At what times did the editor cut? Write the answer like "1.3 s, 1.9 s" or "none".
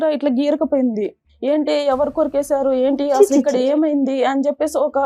1.2 s